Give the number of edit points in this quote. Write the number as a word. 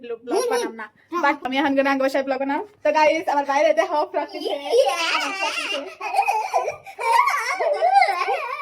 one